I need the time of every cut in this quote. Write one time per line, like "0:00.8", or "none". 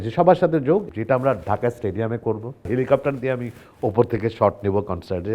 0:00.9
0:02.6

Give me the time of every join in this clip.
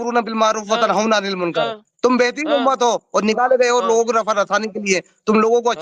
none

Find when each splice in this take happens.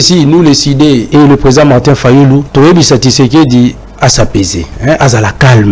0:01.1
0:02.5
0:04.7

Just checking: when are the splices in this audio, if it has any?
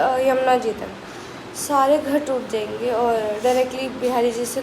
none

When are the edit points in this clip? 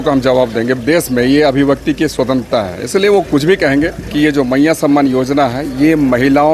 0:00.8
0:04.0

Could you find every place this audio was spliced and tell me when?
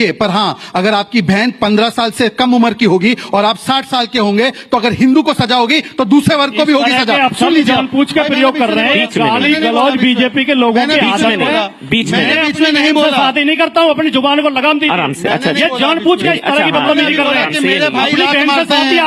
none

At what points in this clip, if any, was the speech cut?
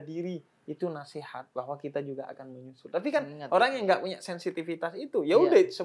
none

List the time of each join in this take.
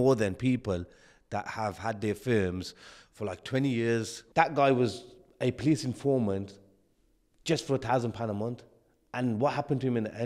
0:04.2

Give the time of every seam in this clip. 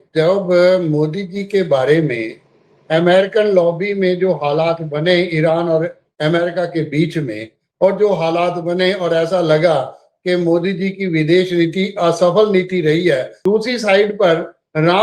0:13.3

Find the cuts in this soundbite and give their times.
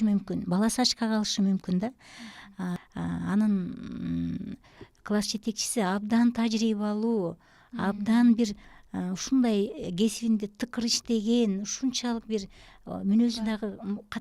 0:02.8

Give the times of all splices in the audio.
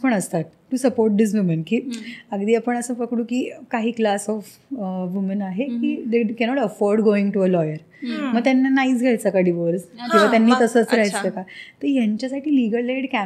none

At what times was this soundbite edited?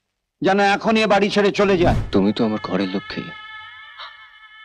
0:02.0

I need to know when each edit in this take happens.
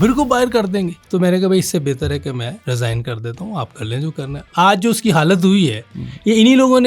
0:01.0
0:02.6
0:04.5

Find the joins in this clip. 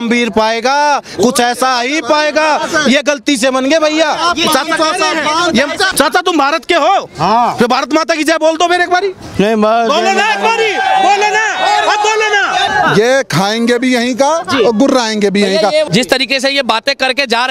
0:05.9
0:12.7
0:15.8

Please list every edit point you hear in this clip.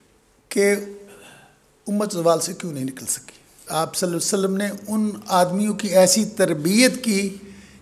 0:03.6

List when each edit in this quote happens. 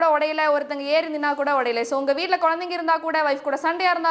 none

